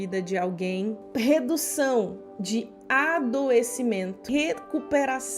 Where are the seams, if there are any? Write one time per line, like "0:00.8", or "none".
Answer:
0:01.0
0:04.2